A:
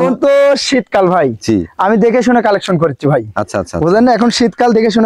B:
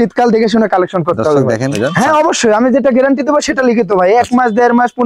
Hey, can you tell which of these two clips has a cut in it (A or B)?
B